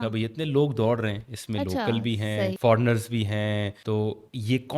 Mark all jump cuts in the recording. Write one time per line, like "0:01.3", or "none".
0:02.6
0:03.8